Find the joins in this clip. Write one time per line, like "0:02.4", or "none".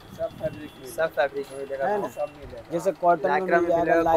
none